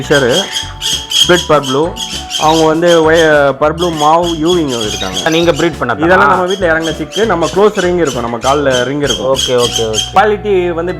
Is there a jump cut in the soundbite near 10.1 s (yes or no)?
yes